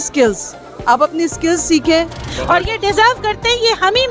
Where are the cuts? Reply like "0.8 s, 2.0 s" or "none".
2.3 s